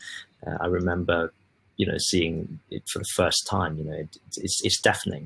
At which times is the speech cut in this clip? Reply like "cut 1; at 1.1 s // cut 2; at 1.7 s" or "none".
none